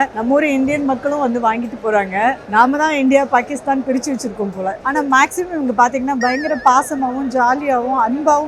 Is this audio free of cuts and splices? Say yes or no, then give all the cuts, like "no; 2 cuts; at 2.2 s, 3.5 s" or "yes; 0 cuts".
no; 1 cut; at 4.8 s